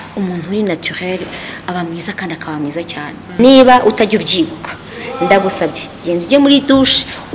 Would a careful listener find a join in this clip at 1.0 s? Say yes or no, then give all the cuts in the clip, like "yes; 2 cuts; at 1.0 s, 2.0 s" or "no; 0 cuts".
no; 1 cut; at 3.4 s